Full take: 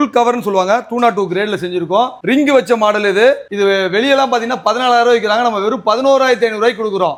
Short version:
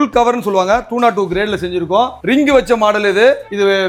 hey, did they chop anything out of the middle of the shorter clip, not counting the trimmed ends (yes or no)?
no